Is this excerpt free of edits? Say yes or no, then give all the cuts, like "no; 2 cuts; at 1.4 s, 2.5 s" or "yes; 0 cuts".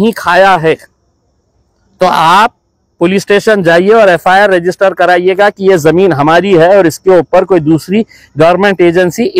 yes; 0 cuts